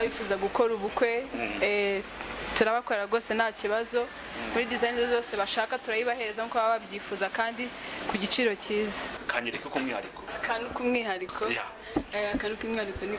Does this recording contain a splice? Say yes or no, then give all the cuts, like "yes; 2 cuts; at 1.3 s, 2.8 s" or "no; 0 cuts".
yes; 1 cut; at 9.1 s